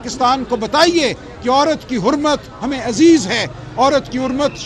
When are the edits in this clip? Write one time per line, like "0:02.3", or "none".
none